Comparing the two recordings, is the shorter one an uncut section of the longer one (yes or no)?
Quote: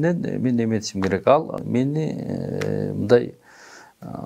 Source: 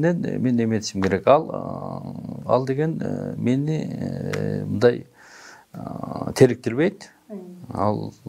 no